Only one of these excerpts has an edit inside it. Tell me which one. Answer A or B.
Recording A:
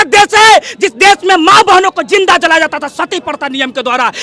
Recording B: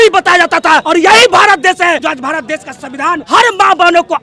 B